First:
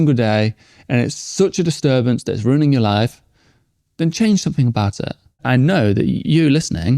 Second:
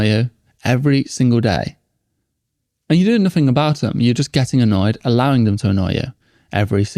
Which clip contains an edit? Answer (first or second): first